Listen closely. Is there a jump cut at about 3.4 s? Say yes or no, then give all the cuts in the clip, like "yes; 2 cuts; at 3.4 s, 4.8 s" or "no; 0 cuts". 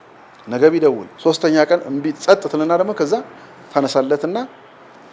no; 1 cut; at 1.1 s